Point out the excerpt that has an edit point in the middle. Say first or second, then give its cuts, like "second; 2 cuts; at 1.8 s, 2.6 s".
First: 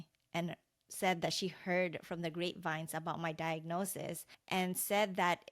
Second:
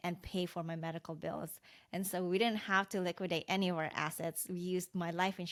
first; 1 cut; at 4.3 s